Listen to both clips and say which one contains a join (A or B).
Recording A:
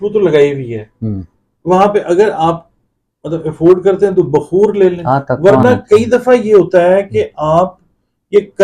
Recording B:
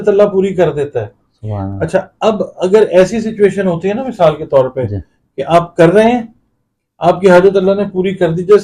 A